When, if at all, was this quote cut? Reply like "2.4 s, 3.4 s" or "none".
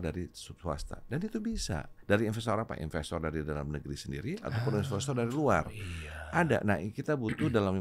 1.9 s